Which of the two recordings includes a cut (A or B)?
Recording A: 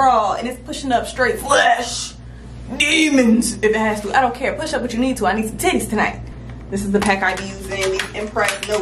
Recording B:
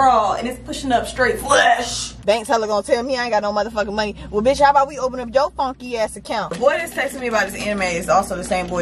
B